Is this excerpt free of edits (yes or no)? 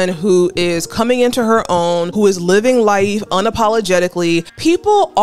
yes